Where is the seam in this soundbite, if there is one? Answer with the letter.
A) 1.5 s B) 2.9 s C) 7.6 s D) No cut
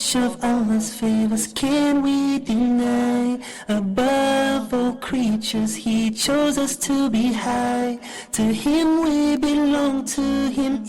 C